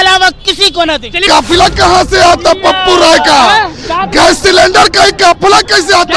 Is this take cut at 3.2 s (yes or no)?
no